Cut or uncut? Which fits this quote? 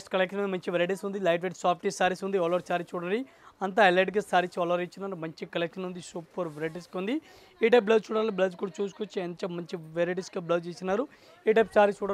uncut